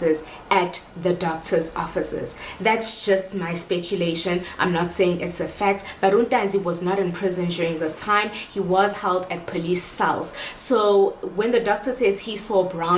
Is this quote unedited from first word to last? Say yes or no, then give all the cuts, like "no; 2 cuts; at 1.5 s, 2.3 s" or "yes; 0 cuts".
yes; 0 cuts